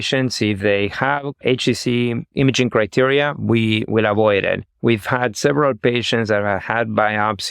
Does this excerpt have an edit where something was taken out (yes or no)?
yes